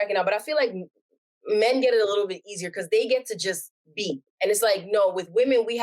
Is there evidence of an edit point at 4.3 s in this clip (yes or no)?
yes